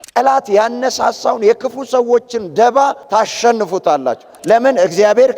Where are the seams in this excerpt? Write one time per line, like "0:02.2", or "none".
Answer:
0:04.3